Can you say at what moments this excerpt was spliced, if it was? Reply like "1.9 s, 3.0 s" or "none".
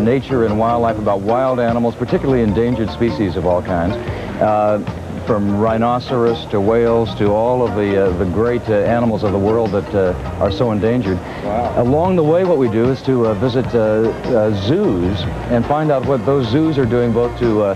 none